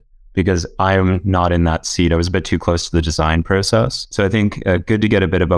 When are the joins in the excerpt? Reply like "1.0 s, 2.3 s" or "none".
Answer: 4.0 s